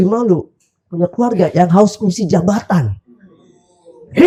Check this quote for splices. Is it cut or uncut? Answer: uncut